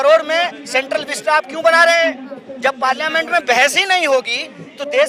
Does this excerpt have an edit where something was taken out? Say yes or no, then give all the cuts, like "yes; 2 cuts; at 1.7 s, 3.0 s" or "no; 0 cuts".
no; 0 cuts